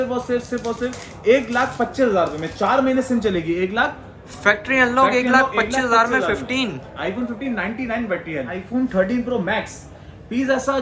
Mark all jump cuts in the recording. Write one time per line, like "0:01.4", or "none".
0:08.6